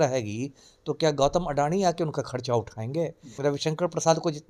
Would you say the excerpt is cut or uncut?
cut